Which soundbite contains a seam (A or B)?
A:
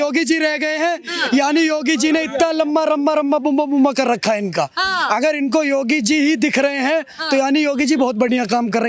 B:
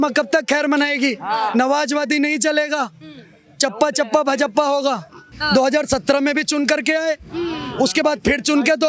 B